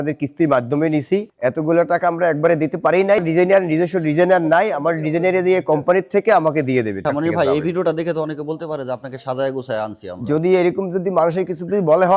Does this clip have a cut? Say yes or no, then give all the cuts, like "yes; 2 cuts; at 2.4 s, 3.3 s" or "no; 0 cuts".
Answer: yes; 3 cuts; at 1.3 s, 3.2 s, 7.0 s